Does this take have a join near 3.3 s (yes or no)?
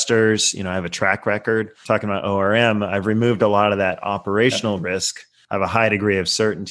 no